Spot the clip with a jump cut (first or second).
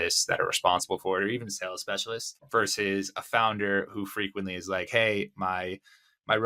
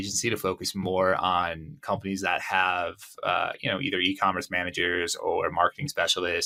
first